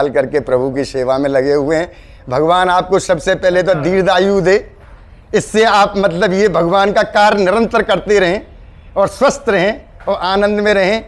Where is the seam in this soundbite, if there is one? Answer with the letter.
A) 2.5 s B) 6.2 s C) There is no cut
C